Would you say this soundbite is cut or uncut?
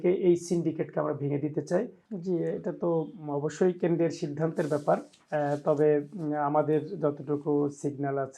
cut